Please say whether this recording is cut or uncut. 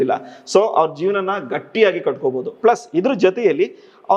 uncut